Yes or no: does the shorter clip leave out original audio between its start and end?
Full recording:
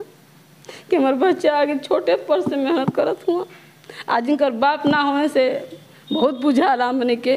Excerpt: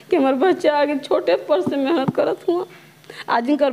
no